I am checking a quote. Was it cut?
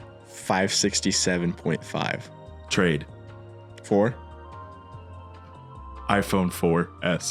yes; 1 cut; at 2.6 s

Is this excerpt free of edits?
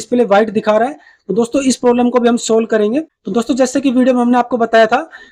yes; 0 cuts

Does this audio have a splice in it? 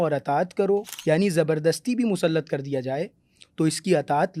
yes; 1 cut; at 0.9 s

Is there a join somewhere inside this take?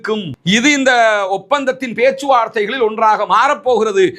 no; 0 cuts

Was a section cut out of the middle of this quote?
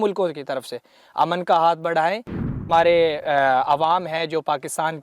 yes; 1 cut; at 2.6 s

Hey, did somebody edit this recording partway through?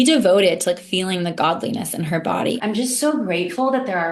yes; 1 cut; at 2.6 s

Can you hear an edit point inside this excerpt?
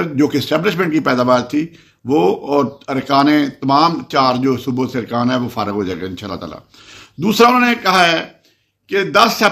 no; 0 cuts

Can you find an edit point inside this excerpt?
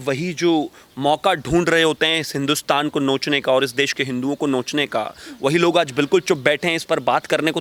no; 0 cuts

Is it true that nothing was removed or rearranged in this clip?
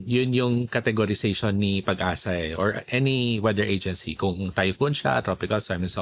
yes; 0 cuts

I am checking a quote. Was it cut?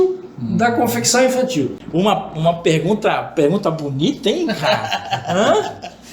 yes; 1 cut; at 1.8 s

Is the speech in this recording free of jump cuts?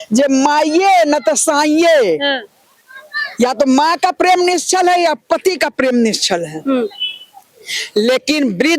yes; 0 cuts

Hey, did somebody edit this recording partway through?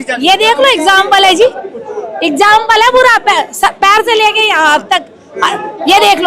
no; 0 cuts

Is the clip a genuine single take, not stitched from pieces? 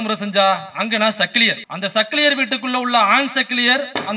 yes; 0 cuts

